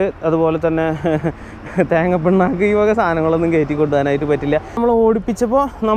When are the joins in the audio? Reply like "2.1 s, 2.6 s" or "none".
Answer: 4.8 s

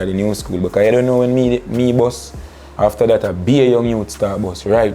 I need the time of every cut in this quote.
none

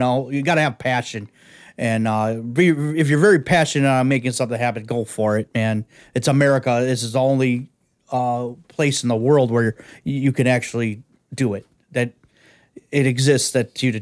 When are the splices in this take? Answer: none

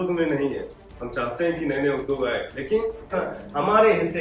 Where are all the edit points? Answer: 3.1 s

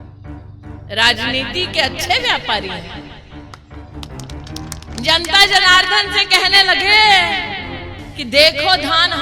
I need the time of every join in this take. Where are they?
0.8 s, 2.9 s, 4.6 s

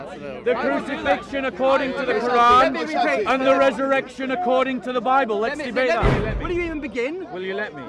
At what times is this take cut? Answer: 6.1 s

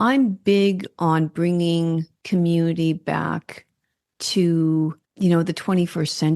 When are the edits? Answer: 2.1 s, 5.0 s

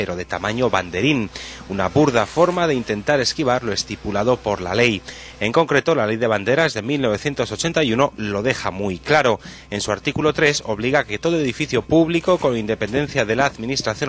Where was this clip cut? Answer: 4.9 s

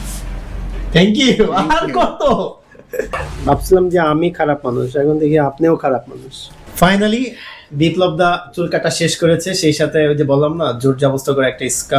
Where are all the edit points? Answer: 3.3 s, 6.6 s

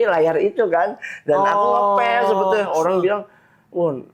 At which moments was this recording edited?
2.7 s

